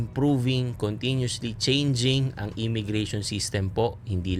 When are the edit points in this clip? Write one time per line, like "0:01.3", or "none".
none